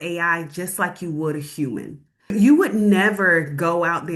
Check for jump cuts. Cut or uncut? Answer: cut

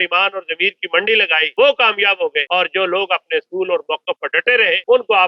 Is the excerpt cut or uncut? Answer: uncut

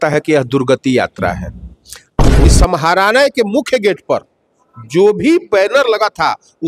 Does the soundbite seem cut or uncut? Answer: cut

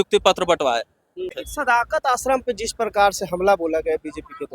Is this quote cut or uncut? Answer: cut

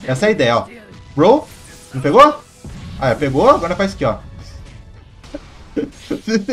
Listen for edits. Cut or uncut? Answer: uncut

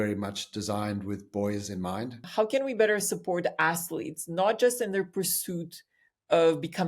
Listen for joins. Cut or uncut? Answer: cut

